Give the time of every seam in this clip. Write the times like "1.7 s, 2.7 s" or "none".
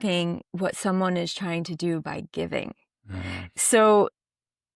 none

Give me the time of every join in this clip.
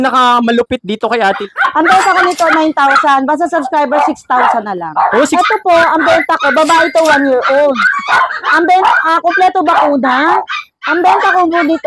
1.4 s, 5.3 s

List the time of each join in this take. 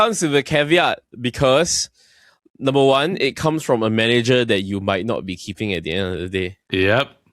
none

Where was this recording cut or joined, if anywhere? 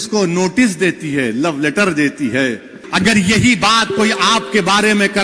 2.8 s

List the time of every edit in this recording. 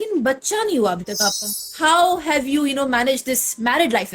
1.6 s

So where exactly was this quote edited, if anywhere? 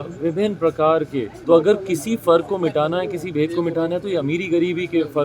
1.3 s

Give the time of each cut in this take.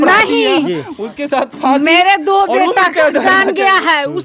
none

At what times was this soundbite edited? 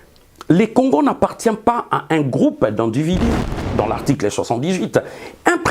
3.6 s

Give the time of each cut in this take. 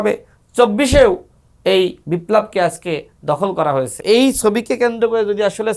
4.0 s

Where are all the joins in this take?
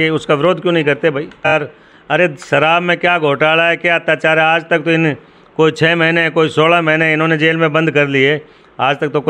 1.5 s

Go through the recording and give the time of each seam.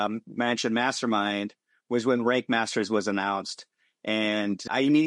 none

